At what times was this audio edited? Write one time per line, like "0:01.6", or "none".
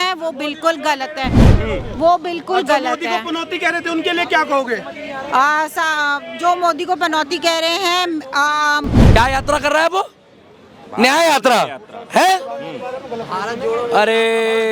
0:08.9

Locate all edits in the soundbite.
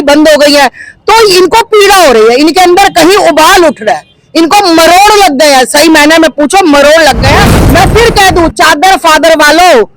0:07.6

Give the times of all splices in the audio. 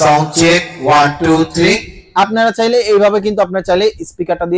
none

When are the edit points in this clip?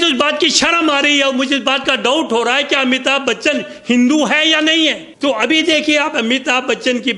0:05.1

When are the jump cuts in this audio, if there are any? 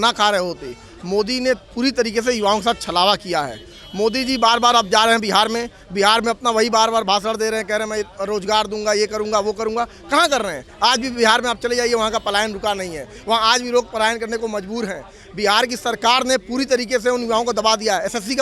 none

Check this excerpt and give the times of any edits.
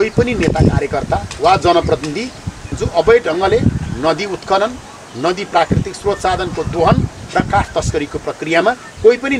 0:02.8

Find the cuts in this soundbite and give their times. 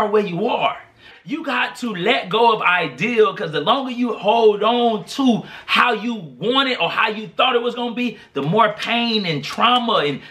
0:01.1

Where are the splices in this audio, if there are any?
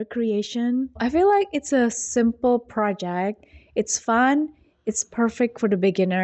0:01.0

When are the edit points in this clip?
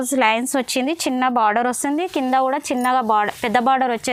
none

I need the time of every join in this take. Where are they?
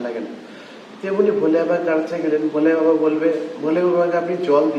none

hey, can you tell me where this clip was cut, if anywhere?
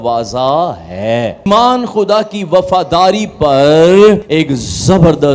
0:01.5
0:04.2

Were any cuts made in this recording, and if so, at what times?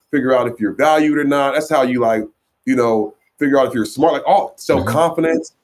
none

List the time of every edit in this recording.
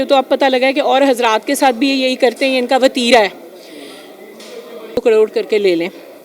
0:05.0

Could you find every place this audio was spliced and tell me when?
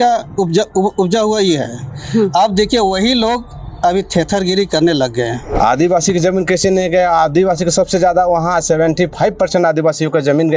0:05.4

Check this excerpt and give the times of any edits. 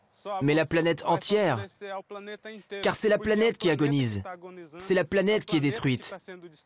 none

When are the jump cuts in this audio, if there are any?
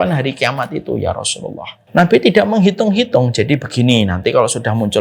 0:01.7

